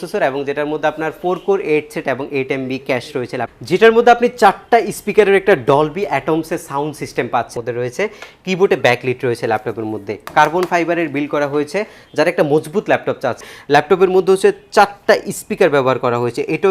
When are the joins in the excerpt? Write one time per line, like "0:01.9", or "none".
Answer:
0:03.5
0:07.5
0:13.5